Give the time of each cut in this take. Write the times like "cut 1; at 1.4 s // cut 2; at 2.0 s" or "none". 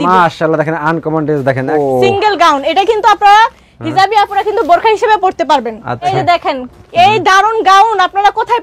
cut 1; at 1.7 s // cut 2; at 6.1 s